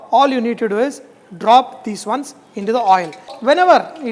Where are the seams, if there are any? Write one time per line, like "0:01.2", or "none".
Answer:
none